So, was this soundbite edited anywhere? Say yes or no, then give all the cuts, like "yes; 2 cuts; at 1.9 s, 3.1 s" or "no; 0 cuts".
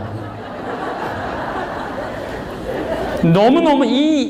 no; 0 cuts